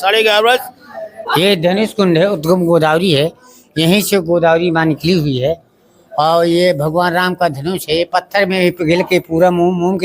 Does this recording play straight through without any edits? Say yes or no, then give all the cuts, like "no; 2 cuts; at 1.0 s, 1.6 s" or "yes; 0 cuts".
no; 1 cut; at 1.3 s